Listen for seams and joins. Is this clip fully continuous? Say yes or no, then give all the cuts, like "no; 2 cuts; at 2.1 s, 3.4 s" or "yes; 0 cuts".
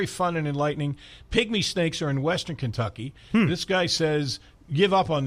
yes; 0 cuts